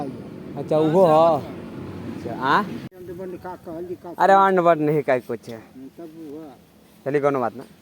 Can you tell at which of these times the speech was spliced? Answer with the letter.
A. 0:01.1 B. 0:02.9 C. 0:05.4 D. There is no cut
B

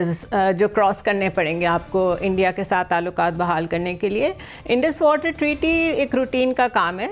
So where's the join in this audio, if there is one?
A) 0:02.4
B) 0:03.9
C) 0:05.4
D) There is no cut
D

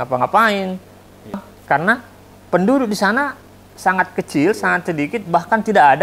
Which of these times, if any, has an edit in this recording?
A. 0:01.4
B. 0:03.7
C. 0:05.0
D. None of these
A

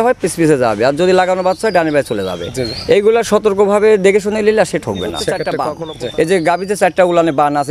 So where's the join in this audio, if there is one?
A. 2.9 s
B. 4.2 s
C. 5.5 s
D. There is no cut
C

